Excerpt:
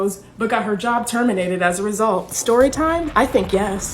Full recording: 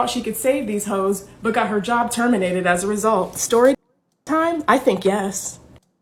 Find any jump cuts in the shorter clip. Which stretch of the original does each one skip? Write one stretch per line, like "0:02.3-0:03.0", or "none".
0:03.8-0:04.3